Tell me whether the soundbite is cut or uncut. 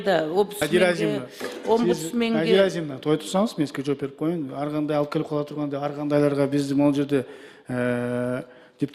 uncut